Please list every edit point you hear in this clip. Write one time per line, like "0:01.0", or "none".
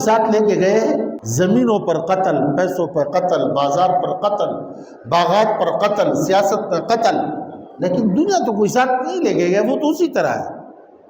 0:01.2